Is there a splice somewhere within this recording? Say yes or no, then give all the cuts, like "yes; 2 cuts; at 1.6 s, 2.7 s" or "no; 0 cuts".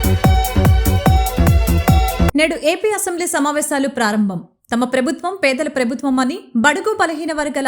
yes; 1 cut; at 2.2 s